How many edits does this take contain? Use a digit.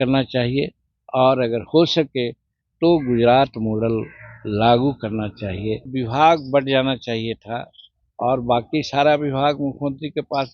1